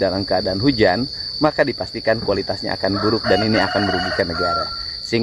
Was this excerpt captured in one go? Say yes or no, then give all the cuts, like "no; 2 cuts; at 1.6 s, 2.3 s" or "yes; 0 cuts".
yes; 0 cuts